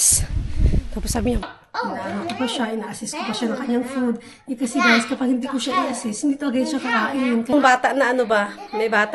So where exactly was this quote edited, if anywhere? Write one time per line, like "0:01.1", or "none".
0:01.4
0:07.5